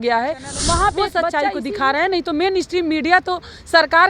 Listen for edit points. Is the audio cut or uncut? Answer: cut